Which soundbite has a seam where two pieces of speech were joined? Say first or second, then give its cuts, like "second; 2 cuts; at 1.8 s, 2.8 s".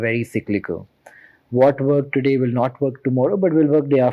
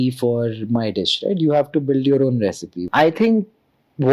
second; 1 cut; at 2.7 s